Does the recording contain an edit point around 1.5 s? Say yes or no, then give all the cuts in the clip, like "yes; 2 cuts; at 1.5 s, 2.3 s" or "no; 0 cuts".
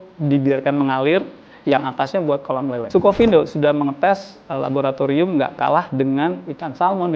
no; 1 cut; at 2.8 s